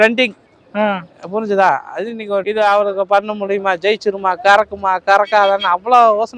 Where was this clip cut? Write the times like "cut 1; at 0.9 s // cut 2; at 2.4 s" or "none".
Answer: cut 1; at 2.4 s